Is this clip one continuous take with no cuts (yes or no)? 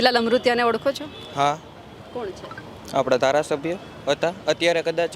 yes